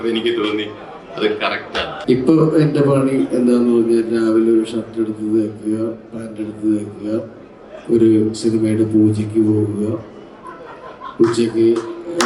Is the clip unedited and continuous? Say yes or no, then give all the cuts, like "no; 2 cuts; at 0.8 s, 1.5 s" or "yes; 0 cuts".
no; 1 cut; at 2.0 s